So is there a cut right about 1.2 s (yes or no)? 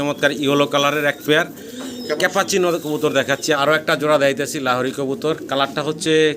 no